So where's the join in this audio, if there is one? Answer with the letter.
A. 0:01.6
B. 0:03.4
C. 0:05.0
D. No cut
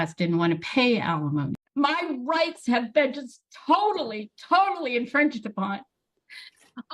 A